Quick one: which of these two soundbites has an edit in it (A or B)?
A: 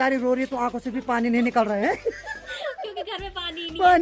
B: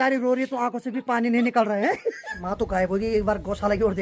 B